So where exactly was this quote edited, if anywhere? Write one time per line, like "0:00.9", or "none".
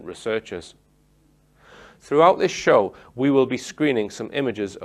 none